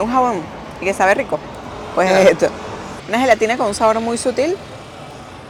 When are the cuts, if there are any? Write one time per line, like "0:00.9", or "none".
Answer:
none